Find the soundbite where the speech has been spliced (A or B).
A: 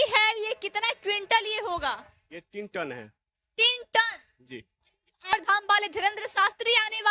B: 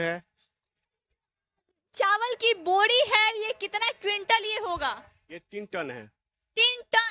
A